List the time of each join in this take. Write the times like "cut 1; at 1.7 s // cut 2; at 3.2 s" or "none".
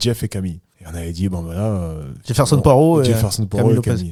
none